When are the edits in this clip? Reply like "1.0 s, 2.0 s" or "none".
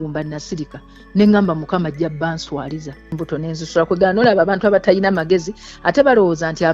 3.1 s